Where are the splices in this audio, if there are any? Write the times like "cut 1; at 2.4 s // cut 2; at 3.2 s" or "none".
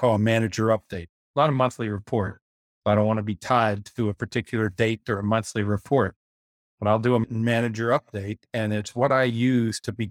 cut 1; at 7.3 s